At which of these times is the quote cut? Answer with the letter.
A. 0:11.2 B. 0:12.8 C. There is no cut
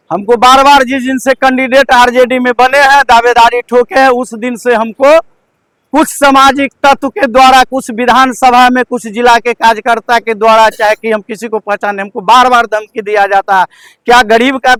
C